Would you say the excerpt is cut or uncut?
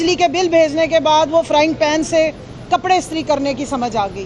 uncut